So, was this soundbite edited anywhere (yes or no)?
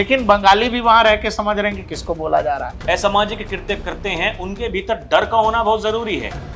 yes